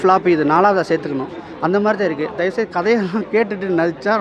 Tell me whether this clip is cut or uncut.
uncut